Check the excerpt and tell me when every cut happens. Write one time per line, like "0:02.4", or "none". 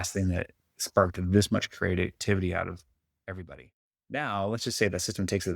0:03.4